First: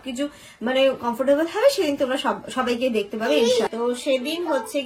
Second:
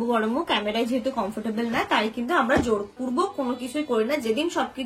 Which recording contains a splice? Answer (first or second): first